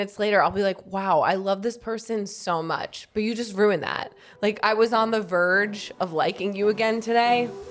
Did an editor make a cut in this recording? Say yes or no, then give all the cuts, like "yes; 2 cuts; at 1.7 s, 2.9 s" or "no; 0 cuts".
no; 0 cuts